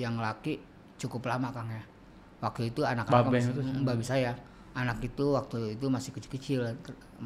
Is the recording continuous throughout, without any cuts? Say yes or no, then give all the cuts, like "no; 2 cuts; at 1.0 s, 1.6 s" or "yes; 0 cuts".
yes; 0 cuts